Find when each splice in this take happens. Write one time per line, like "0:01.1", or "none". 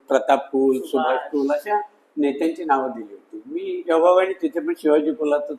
none